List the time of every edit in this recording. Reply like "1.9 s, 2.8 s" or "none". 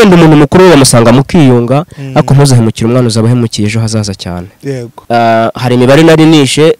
4.9 s